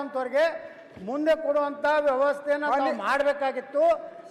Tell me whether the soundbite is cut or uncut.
uncut